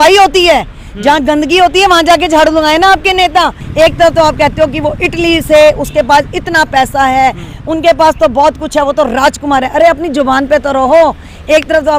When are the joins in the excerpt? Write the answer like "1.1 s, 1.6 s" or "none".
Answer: 3.6 s